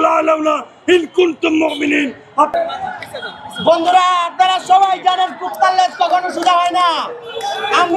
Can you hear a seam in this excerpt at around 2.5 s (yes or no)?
yes